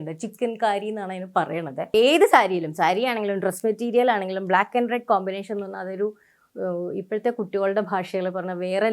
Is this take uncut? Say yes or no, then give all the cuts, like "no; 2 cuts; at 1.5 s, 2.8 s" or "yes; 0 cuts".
no; 1 cut; at 1.9 s